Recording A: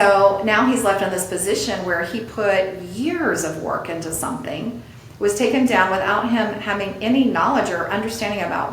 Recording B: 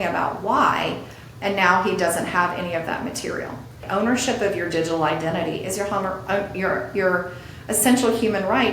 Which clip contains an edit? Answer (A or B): B